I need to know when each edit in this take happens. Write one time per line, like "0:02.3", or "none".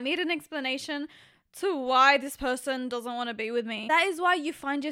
0:03.8